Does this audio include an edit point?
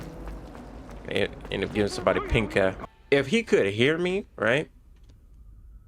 yes; 1 cut; at 2.9 s

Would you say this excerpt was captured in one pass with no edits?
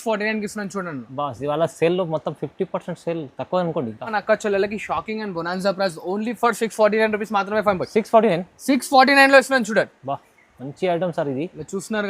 no; 1 cut; at 4.1 s

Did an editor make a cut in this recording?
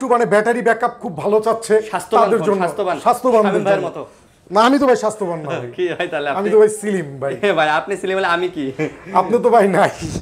no; 0 cuts

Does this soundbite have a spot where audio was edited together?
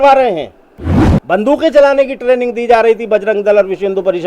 yes; 1 cut; at 1.1 s

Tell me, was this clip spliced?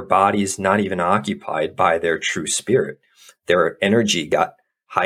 no; 0 cuts

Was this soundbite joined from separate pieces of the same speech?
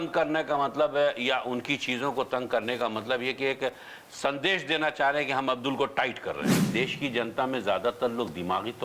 yes; 1 cut; at 6.5 s

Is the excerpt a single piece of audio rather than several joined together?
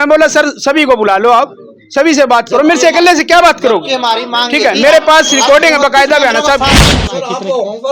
no; 1 cut; at 6.9 s

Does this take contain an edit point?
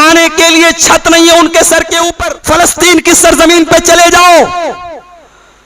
yes; 1 cut; at 2.2 s

